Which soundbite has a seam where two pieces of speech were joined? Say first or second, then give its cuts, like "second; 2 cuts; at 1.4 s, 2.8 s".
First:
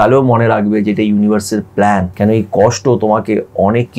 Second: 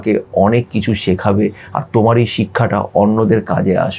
first; 1 cut; at 2.1 s